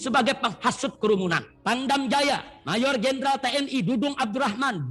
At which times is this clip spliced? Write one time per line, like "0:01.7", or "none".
0:01.5